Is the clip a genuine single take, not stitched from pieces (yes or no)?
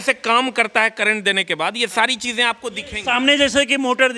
yes